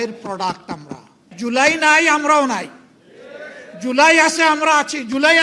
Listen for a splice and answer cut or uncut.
cut